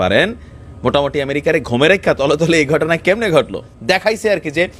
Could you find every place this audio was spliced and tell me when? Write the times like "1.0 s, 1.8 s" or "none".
3.7 s